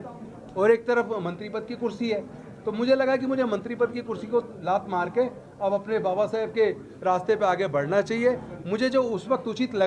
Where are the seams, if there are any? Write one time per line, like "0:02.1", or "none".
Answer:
none